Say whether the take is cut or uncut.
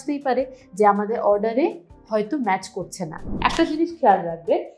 cut